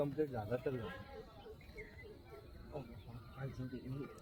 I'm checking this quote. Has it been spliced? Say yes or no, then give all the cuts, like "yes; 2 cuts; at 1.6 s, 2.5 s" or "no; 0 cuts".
no; 0 cuts